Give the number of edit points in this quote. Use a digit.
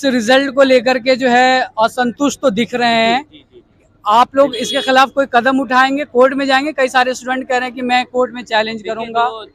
0